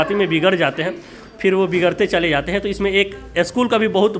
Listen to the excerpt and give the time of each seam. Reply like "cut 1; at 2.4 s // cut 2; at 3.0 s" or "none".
none